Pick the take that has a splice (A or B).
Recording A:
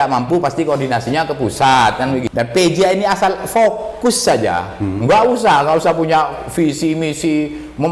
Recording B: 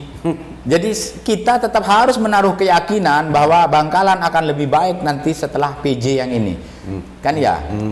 A